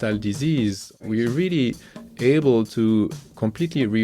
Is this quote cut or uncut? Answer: cut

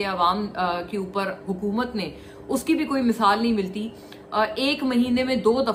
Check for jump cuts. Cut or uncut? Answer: uncut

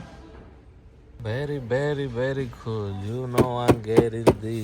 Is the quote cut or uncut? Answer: cut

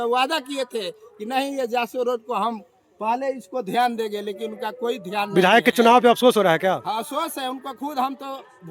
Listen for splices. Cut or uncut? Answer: uncut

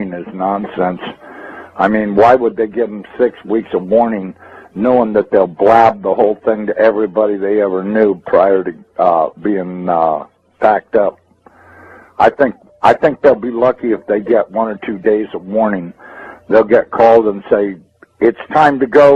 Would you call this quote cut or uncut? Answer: uncut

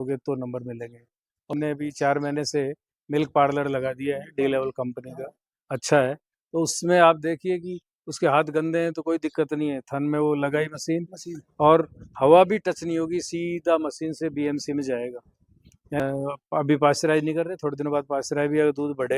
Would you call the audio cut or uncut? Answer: cut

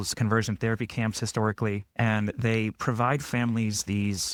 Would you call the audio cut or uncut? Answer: uncut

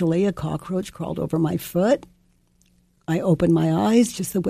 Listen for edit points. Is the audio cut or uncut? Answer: uncut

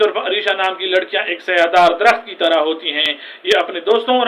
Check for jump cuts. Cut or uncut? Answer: uncut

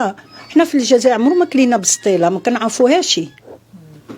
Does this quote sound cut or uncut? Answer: uncut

